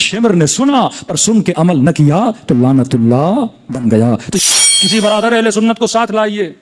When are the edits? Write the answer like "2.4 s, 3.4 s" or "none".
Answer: 4.4 s